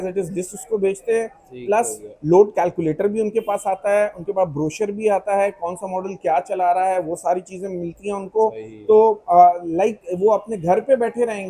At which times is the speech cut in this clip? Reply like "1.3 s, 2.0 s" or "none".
none